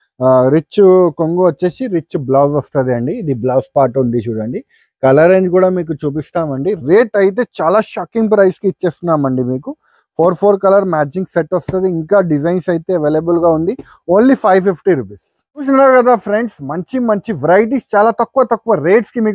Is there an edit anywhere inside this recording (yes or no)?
no